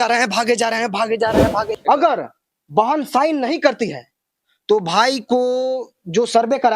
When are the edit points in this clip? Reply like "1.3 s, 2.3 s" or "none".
1.7 s